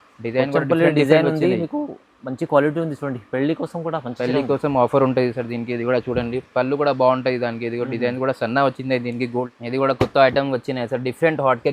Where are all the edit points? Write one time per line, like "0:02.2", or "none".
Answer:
0:09.5